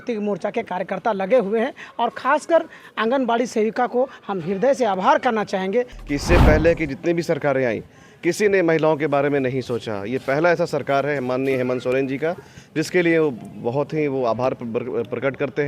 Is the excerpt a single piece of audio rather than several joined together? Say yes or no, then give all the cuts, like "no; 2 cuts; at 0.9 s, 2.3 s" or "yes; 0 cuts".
no; 1 cut; at 6.0 s